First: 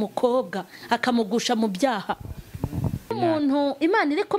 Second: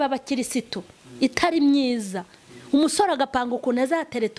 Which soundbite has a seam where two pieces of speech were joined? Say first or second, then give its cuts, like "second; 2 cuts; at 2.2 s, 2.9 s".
first; 1 cut; at 3.1 s